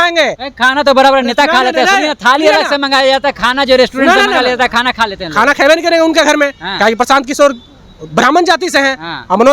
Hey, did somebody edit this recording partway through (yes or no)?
no